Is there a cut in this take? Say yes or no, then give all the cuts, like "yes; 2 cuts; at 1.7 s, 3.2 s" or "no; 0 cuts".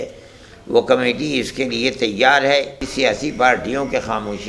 yes; 1 cut; at 2.8 s